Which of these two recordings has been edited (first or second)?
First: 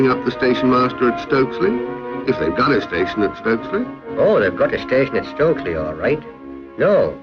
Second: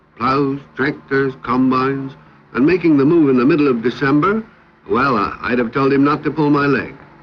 second